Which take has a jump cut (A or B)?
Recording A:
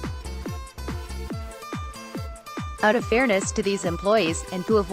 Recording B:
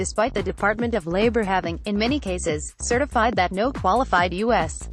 A